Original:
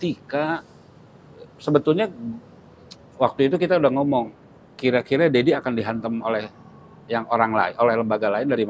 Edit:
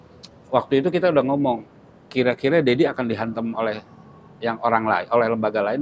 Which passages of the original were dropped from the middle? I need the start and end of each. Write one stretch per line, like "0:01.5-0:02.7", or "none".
none